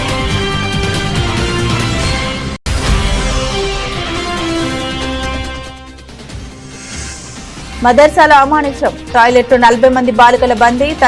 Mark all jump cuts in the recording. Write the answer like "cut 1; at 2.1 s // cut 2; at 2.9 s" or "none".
cut 1; at 2.5 s

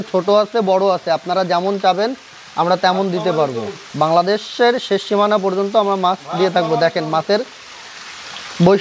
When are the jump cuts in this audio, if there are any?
none

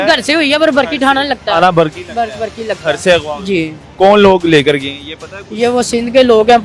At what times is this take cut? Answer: none

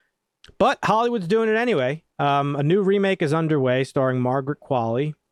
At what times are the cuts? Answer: none

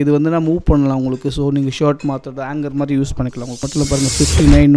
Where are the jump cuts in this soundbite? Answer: cut 1; at 3.7 s

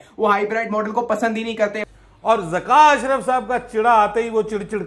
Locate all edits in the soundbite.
cut 1; at 1.8 s

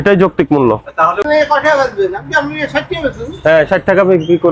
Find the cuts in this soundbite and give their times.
cut 1; at 1.2 s

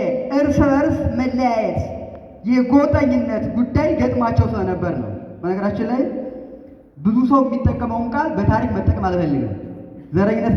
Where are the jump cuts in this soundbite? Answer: none

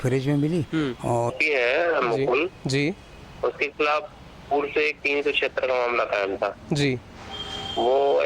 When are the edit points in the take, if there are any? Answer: cut 1; at 1.4 s

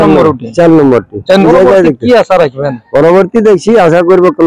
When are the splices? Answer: cut 1; at 1.4 s

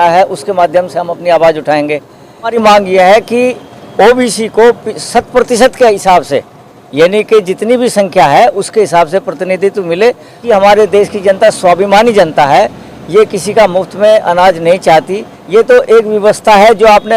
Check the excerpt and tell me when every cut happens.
cut 1; at 2.5 s // cut 2; at 10.4 s

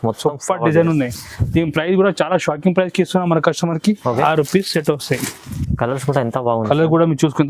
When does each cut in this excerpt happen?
cut 1; at 4.2 s // cut 2; at 5.6 s

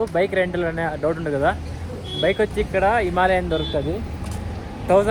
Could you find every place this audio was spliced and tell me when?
none

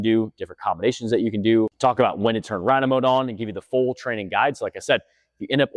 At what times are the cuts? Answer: cut 1; at 1.7 s

